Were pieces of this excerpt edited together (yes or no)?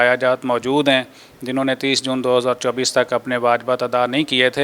no